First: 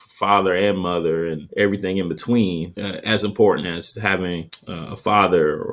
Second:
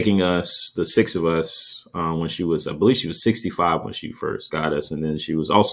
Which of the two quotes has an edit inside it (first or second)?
first